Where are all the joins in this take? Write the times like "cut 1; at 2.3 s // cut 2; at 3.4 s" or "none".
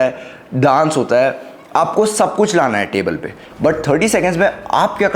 cut 1; at 3.4 s

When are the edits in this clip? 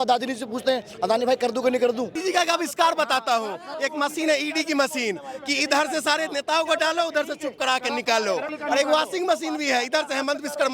cut 1; at 2.1 s // cut 2; at 8.5 s

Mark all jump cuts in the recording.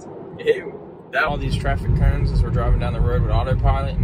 cut 1; at 1.3 s

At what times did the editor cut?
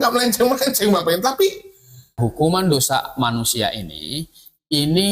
cut 1; at 2.1 s

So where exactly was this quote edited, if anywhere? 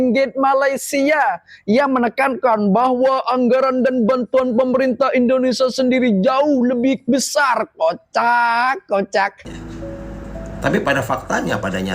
cut 1; at 9.4 s

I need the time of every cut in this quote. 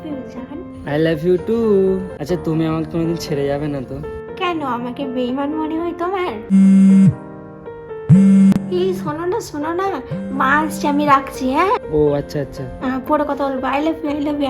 cut 1; at 2.1 s // cut 2; at 6.5 s

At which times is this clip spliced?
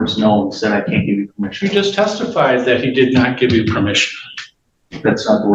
none

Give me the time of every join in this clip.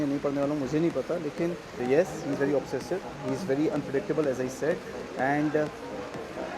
cut 1; at 1.7 s

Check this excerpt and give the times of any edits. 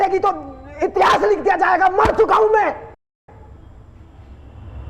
none

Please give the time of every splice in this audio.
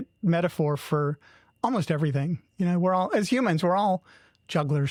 none

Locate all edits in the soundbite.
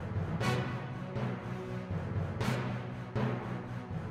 none

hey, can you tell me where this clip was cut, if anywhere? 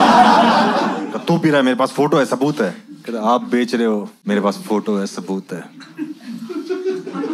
cut 1; at 1.1 s // cut 2; at 4.2 s

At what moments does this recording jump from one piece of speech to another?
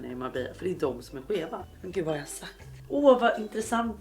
cut 1; at 1.8 s // cut 2; at 2.7 s

